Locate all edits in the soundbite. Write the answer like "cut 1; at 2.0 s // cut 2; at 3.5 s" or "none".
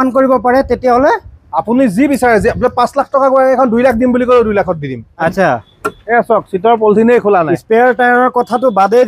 cut 1; at 5.2 s